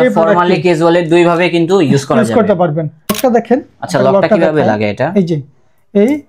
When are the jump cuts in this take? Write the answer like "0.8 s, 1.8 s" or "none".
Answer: 3.1 s